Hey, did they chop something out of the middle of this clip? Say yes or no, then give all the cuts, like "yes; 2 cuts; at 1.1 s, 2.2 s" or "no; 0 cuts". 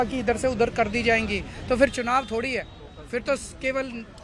no; 0 cuts